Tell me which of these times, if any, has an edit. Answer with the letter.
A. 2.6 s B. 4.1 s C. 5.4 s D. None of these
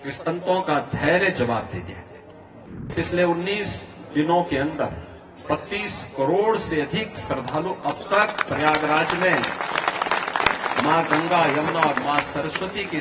A